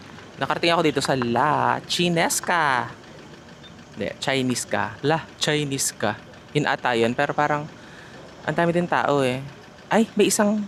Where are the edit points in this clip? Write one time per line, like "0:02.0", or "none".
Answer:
none